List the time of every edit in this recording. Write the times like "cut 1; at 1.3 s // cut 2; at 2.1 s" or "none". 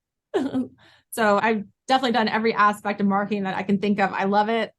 cut 1; at 1.4 s